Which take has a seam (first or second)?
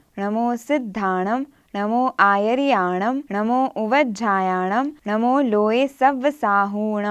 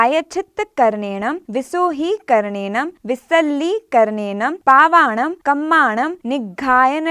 second